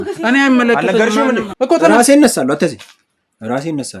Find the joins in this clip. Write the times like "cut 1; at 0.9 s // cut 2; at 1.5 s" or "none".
cut 1; at 1.5 s